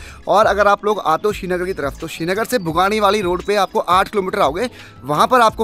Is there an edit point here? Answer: no; 0 cuts

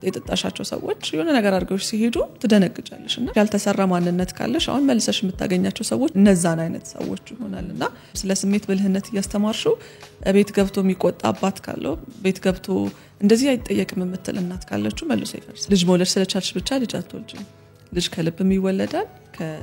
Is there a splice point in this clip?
yes; 4 cuts; at 3.3 s, 6.1 s, 8.1 s, 15.7 s

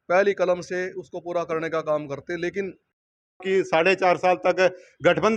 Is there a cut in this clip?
yes; 1 cut; at 3.4 s

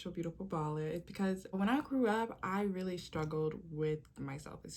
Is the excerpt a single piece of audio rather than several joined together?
no; 1 cut; at 1.5 s

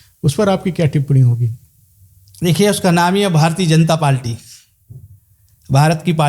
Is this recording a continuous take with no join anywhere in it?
yes; 0 cuts

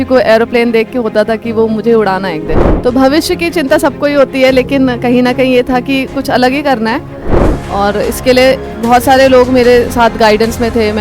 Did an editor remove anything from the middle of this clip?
yes; 2 cuts; at 2.6 s, 7.3 s

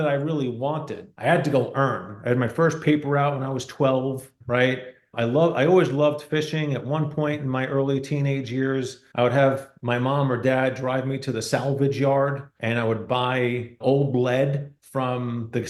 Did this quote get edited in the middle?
no; 0 cuts

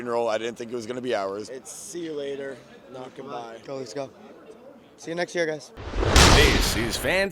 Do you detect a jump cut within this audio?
yes; 3 cuts; at 1.5 s, 3.6 s, 5.8 s

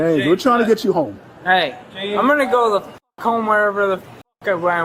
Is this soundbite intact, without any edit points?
yes; 0 cuts

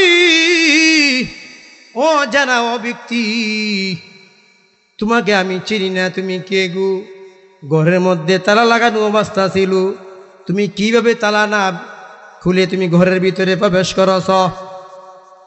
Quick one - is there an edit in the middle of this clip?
no; 0 cuts

